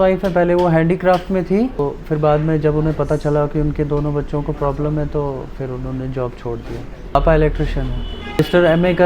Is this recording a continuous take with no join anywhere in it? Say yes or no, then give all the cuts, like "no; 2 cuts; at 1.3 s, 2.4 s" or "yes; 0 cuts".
yes; 0 cuts